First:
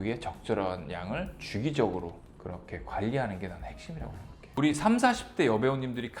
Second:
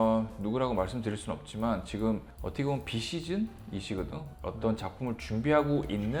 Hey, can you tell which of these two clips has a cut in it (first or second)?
first